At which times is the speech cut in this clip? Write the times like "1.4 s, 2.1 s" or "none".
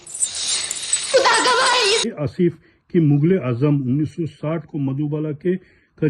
2.1 s